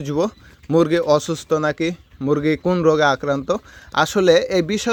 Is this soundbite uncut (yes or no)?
yes